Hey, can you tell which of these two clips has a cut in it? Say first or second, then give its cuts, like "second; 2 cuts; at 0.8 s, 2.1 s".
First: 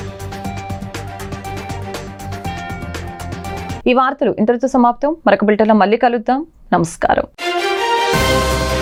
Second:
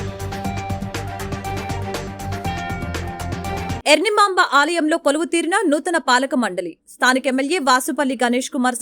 second; 1 cut; at 3.8 s